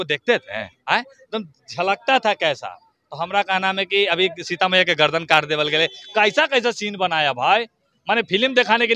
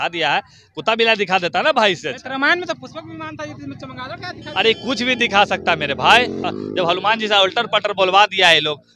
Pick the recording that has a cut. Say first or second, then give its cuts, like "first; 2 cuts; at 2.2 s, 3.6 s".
second; 1 cut; at 6.4 s